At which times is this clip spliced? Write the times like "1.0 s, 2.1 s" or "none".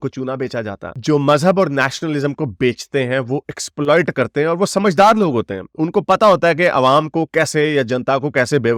none